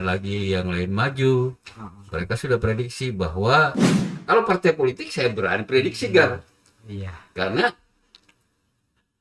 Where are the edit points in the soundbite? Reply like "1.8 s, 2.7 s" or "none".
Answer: 3.9 s